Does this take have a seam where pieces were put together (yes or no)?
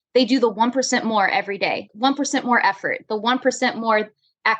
yes